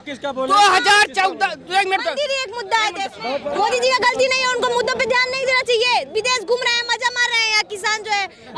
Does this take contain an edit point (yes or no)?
yes